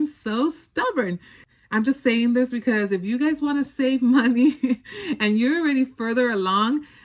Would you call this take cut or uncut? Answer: uncut